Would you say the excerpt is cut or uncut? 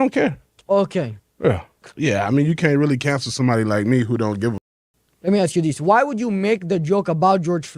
cut